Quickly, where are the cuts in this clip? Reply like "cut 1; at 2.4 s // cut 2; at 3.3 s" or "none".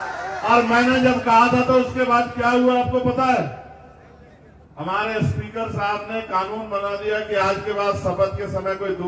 none

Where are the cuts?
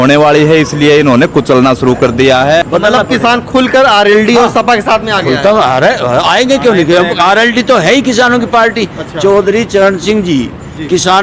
cut 1; at 2.7 s

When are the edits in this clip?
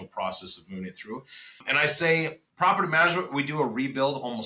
cut 1; at 1.6 s // cut 2; at 2.4 s

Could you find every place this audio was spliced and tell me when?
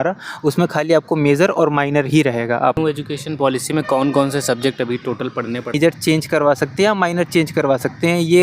cut 1; at 2.8 s // cut 2; at 5.7 s

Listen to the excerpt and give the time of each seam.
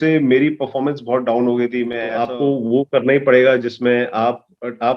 cut 1; at 2.2 s

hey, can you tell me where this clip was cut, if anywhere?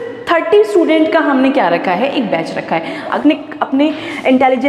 cut 1; at 3.2 s

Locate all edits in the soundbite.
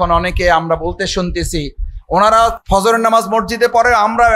cut 1; at 2.6 s

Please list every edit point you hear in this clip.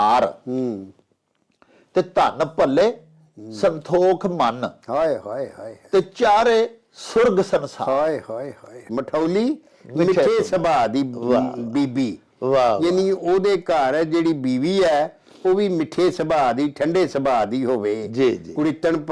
cut 1; at 8.8 s

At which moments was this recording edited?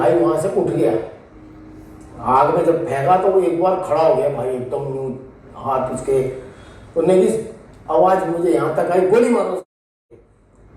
none

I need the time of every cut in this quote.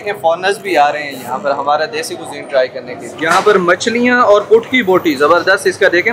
cut 1; at 3.1 s

